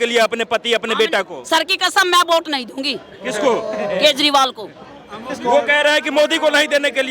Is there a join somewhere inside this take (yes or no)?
no